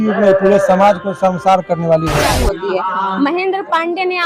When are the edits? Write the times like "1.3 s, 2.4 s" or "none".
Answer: 2.2 s